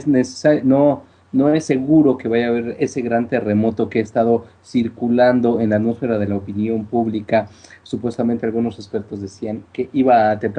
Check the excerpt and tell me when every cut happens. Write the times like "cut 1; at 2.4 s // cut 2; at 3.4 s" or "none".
none